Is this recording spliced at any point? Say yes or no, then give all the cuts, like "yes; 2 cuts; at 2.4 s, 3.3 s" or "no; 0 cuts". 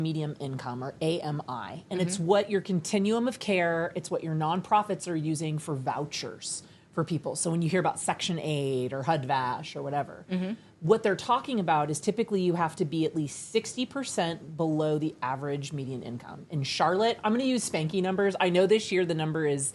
no; 0 cuts